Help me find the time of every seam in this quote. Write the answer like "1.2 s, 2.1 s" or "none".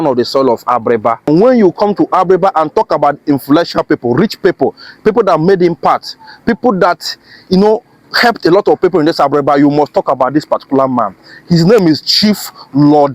1.3 s